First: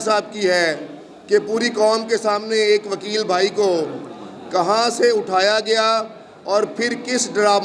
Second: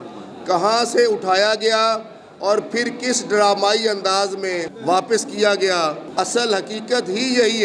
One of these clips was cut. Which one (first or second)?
second